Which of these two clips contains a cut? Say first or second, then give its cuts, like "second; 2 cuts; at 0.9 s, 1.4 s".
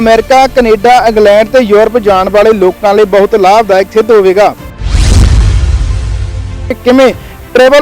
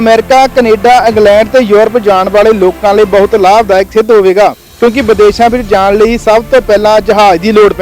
first; 2 cuts; at 4.7 s, 6.7 s